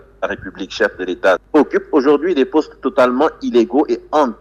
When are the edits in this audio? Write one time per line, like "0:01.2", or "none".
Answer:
0:01.4